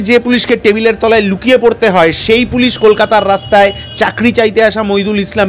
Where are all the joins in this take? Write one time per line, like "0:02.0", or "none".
none